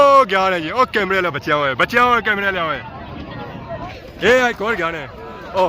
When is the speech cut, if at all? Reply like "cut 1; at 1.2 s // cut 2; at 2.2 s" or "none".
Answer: cut 1; at 3.9 s